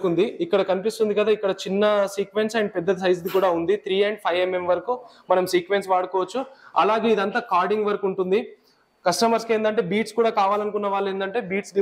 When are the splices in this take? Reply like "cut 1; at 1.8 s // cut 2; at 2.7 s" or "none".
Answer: none